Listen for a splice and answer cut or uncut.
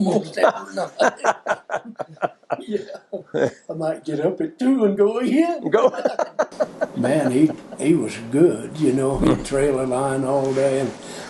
cut